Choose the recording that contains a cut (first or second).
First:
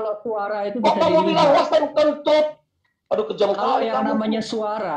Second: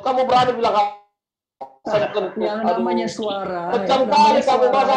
second